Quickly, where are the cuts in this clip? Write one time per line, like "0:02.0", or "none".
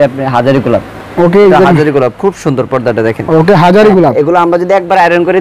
none